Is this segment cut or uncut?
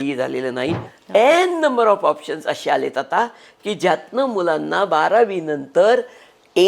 cut